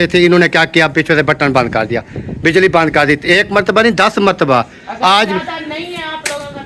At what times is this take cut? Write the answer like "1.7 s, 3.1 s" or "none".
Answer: none